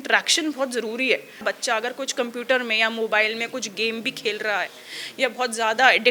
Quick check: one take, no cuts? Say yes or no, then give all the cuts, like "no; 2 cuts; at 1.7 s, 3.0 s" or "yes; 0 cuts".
no; 1 cut; at 1.4 s